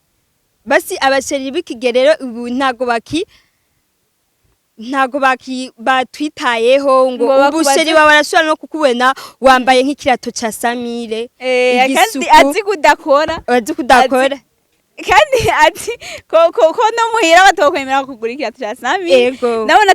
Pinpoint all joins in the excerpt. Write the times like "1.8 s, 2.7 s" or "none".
none